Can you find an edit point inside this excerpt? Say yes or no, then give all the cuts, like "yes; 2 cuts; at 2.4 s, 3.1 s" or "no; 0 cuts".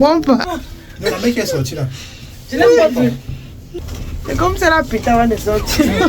yes; 1 cut; at 3.7 s